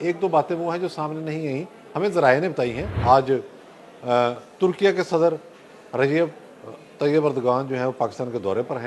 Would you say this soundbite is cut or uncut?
cut